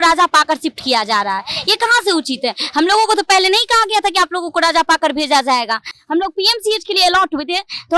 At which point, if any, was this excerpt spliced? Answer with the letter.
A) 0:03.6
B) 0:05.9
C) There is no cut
C